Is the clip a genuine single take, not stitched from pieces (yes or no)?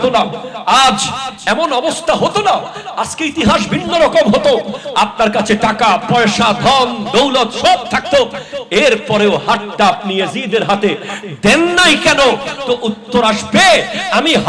yes